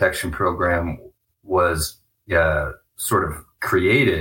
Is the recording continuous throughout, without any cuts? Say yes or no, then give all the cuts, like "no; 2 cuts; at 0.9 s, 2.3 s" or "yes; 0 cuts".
yes; 0 cuts